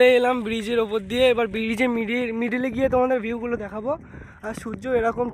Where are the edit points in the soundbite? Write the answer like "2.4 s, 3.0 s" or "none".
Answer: none